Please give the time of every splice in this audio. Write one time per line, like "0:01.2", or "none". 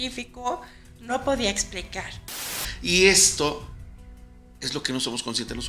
0:02.5